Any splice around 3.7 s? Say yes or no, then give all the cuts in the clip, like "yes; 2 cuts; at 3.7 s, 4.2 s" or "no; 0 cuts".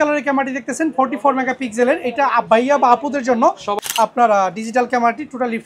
yes; 1 cut; at 3.7 s